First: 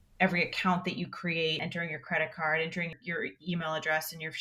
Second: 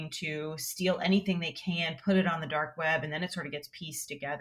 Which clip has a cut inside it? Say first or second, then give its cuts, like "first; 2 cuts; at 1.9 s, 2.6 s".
first; 2 cuts; at 1.6 s, 3.0 s